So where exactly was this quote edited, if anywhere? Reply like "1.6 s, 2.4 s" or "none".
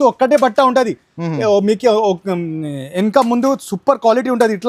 none